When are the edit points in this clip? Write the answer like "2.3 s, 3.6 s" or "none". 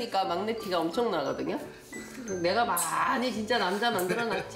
none